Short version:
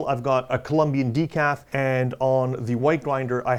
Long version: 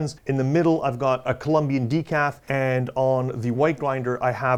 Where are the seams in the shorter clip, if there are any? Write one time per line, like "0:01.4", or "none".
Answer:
none